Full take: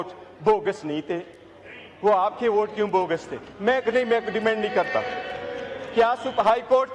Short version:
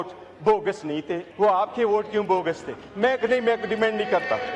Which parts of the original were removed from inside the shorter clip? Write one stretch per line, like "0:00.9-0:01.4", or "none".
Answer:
0:01.2-0:01.8